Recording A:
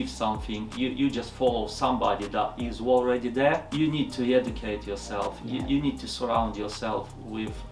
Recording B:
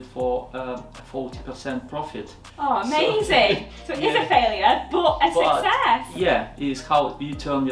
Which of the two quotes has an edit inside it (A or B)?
A